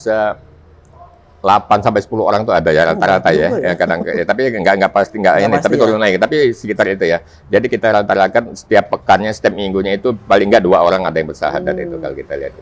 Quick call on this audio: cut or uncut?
uncut